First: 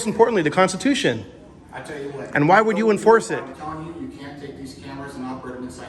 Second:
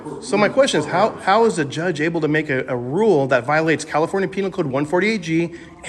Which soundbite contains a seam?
first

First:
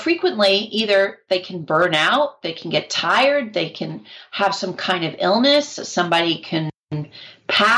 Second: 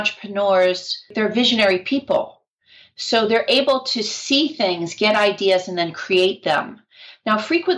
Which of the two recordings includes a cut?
second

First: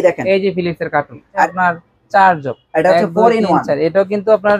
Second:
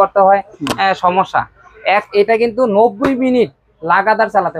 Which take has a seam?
first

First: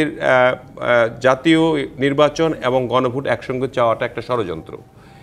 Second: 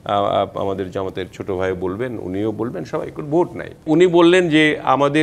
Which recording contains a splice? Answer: second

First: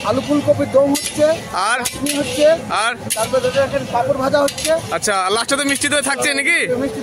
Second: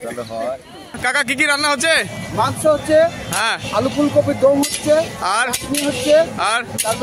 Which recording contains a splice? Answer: second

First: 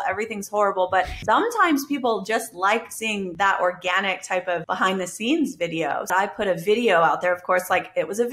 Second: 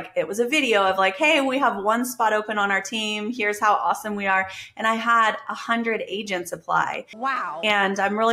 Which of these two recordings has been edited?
first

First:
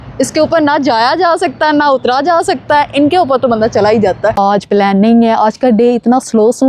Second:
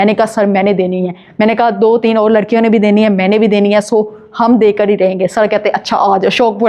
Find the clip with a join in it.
first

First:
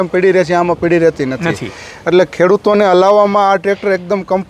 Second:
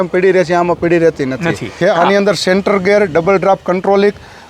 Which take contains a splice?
second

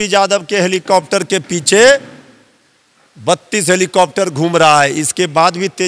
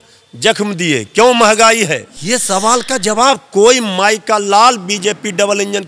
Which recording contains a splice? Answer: second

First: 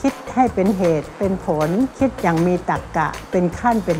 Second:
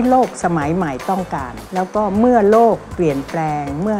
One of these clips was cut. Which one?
second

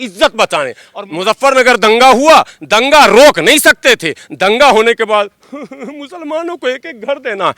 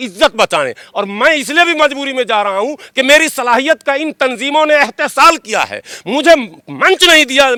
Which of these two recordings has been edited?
first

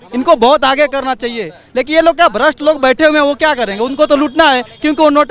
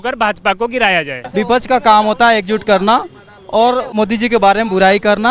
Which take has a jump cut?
second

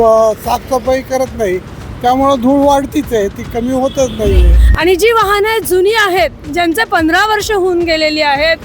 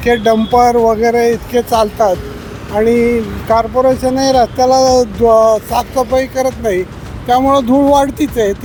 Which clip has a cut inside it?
first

